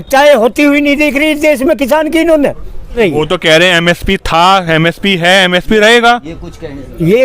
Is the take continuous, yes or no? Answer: no